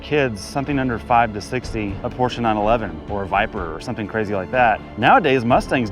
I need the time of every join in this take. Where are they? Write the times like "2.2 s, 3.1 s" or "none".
2.0 s, 4.9 s

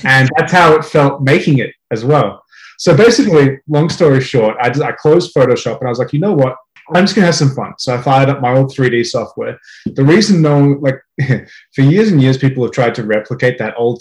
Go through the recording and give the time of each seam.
6.7 s

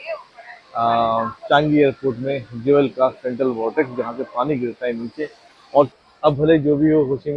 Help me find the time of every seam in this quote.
5.9 s

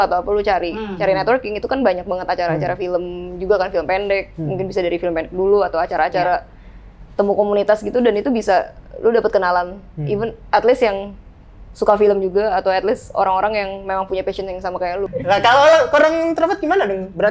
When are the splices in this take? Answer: 15.1 s

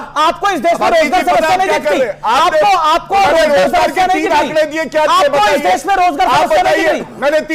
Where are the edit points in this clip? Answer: none

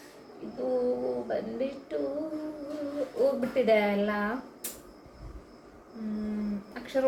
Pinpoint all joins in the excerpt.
none

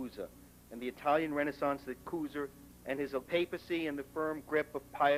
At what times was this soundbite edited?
none

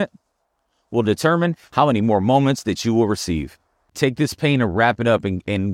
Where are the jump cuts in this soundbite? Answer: 3.9 s

